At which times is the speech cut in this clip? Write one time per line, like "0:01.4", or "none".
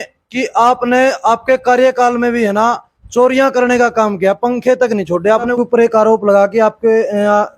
0:05.5